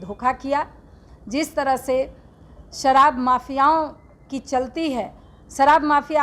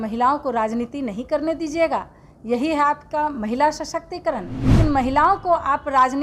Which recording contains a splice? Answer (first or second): second